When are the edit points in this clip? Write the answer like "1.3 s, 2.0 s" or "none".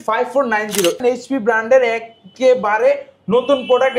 1.0 s